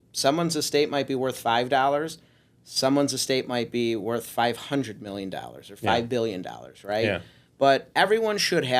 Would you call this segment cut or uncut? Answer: uncut